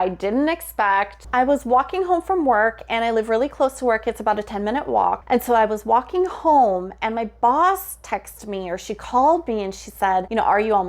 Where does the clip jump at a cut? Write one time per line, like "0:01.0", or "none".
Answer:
none